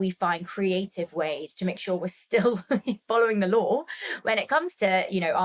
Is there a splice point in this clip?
no; 0 cuts

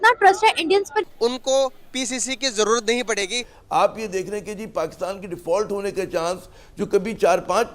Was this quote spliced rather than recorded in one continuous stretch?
yes; 2 cuts; at 1.0 s, 3.5 s

